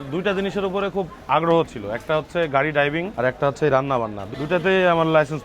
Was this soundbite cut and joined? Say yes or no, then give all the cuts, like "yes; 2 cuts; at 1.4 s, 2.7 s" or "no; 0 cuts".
yes; 3 cuts; at 1.2 s, 3.1 s, 4.2 s